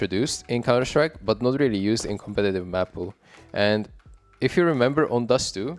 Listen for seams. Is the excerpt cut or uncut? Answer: uncut